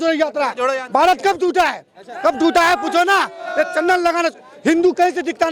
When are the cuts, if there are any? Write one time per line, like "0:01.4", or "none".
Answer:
none